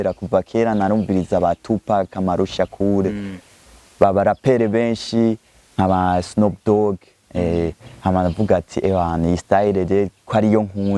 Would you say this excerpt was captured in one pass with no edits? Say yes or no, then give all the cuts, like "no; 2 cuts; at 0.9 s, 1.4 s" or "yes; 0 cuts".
yes; 0 cuts